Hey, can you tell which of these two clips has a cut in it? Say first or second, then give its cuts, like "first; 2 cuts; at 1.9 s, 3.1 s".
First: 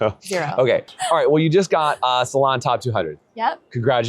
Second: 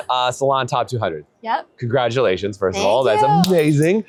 first; 1 cut; at 1.0 s